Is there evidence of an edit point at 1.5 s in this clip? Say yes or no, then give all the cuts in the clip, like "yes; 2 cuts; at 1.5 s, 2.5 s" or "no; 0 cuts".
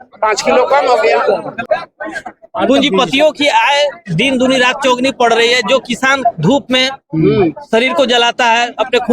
yes; 1 cut; at 1.5 s